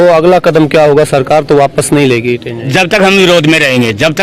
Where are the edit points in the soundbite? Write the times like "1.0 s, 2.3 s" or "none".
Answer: none